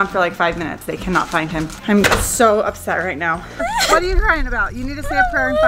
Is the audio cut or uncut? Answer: cut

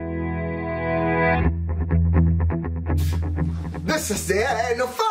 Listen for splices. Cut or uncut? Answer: cut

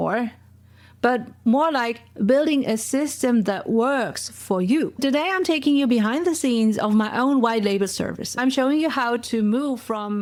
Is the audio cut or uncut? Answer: uncut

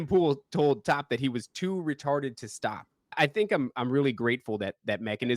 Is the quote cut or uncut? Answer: cut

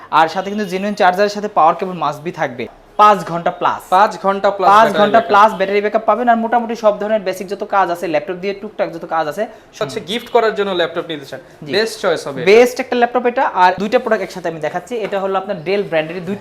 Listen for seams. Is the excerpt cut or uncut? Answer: cut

